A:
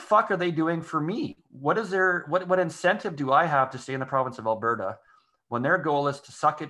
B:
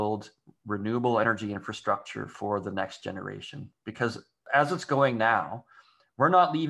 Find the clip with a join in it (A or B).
B